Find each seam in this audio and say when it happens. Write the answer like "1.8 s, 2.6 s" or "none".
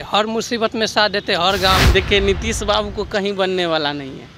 1.8 s